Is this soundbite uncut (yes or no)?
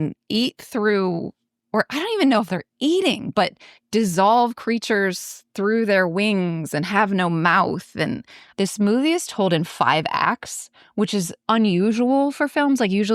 no